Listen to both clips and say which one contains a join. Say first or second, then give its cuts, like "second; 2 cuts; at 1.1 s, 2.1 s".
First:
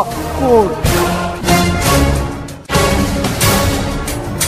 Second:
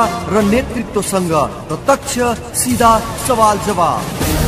first; 2 cuts; at 2.5 s, 3.7 s